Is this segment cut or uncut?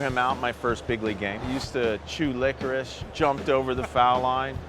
cut